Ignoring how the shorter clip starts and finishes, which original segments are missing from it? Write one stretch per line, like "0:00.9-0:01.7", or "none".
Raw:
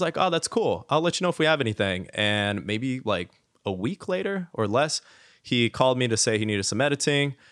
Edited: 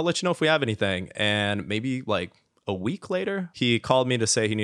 0:04.5-0:05.4